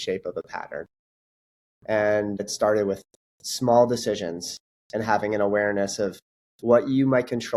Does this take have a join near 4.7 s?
no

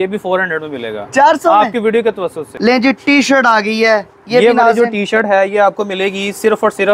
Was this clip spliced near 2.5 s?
yes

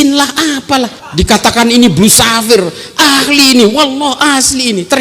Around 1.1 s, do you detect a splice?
yes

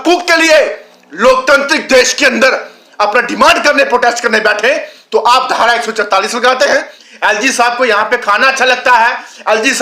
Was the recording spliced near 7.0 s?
yes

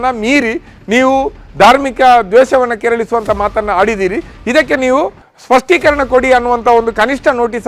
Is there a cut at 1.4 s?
no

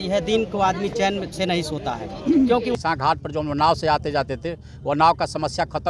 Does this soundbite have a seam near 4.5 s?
no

